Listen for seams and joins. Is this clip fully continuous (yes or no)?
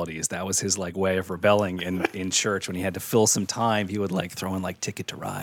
yes